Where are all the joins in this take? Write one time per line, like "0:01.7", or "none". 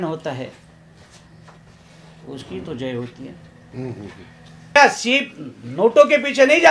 0:04.8